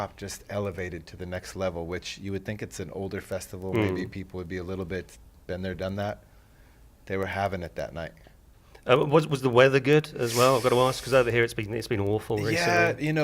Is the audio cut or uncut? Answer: cut